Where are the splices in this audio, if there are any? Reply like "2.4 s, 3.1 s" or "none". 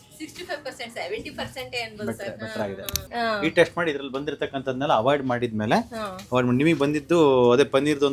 3.1 s